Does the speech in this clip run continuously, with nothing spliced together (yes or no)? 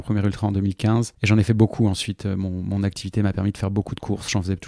no